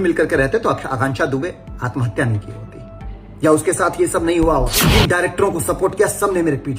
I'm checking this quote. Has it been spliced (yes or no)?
yes